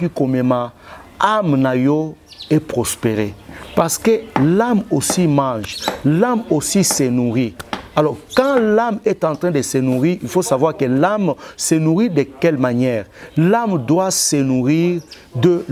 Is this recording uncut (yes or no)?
yes